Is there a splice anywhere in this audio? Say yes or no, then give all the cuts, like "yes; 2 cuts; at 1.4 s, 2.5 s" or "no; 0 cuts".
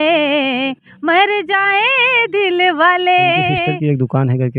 yes; 1 cut; at 3.6 s